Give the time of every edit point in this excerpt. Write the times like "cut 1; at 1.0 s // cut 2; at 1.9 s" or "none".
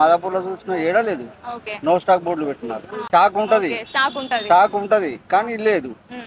cut 1; at 3.0 s